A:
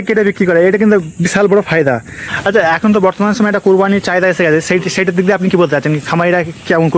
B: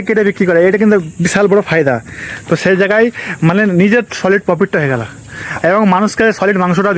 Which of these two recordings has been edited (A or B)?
A